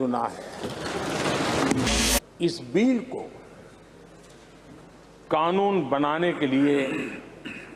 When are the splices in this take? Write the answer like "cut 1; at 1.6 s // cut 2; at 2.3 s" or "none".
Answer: cut 1; at 1.9 s